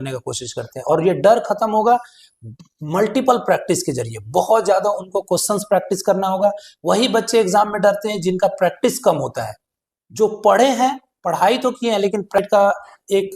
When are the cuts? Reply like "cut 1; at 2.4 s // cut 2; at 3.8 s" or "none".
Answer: cut 1; at 12.4 s